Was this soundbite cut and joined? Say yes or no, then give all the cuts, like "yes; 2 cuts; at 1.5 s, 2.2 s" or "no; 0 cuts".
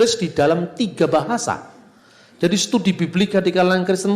no; 0 cuts